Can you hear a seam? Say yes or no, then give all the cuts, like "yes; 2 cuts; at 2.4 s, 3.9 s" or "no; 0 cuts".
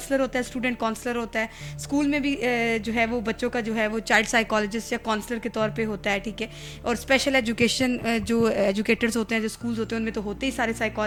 no; 0 cuts